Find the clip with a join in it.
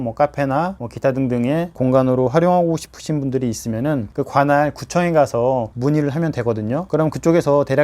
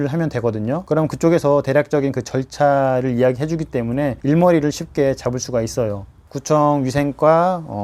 first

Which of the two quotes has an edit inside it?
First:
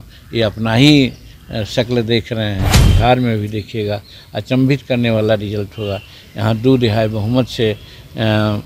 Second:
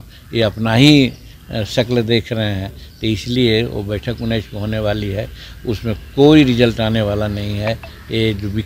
first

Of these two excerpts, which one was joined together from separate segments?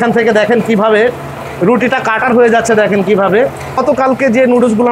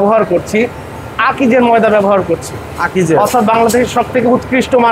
first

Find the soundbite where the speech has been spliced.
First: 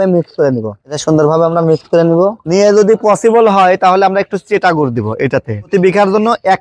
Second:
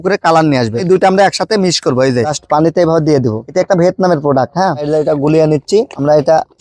second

